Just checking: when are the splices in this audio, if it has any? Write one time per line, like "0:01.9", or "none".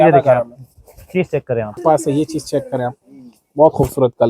0:01.8